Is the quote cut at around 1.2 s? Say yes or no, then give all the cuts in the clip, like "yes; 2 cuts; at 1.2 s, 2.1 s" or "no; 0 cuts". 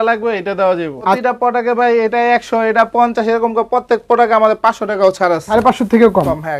yes; 2 cuts; at 1.2 s, 5.5 s